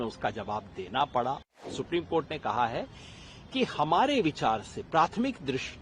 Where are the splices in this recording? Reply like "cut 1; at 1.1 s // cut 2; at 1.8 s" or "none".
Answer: cut 1; at 1.6 s